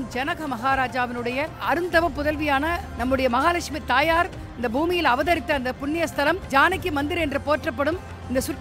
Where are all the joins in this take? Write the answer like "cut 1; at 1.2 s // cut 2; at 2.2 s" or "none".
cut 1; at 1.6 s // cut 2; at 2.9 s // cut 3; at 6.4 s